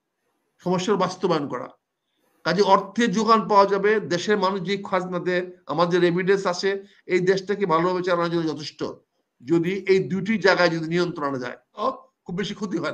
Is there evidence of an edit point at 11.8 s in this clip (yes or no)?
yes